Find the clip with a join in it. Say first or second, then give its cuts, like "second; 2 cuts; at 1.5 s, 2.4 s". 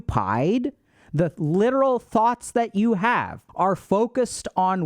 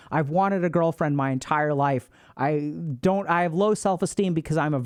first; 1 cut; at 3.4 s